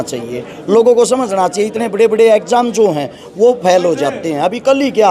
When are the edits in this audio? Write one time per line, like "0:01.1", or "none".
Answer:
none